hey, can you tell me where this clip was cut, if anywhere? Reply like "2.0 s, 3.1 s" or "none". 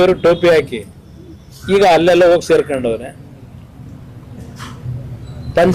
4.1 s